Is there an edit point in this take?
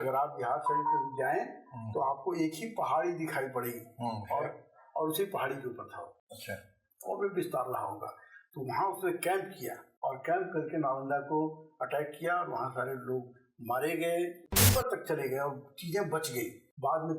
yes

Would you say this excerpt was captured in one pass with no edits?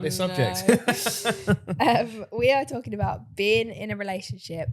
yes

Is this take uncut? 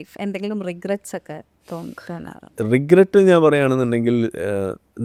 yes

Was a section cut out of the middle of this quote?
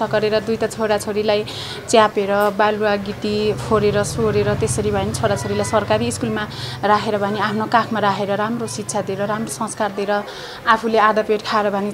no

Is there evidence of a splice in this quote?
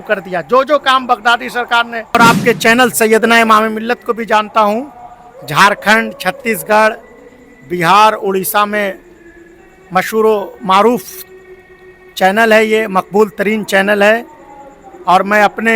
yes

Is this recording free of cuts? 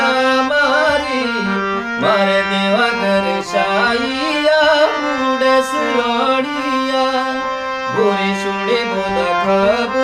yes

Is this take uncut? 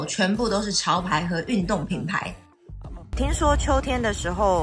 no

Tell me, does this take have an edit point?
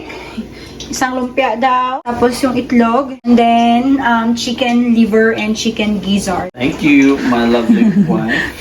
yes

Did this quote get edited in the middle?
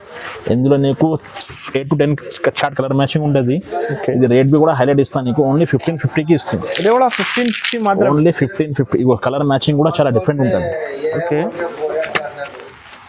no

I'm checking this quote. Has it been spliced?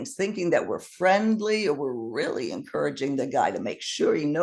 no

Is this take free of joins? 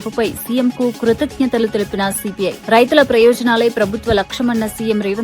yes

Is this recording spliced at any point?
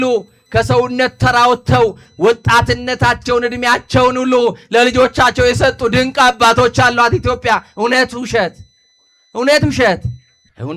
no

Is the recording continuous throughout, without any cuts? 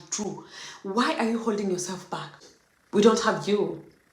no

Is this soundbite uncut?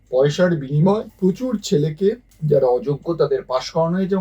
no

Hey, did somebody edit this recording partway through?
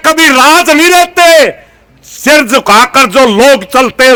no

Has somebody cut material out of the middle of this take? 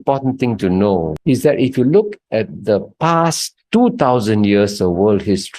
yes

